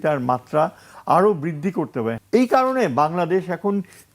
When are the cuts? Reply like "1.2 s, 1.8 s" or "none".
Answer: 2.1 s